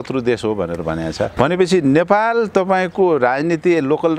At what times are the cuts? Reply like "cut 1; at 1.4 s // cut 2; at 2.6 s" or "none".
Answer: cut 1; at 1.3 s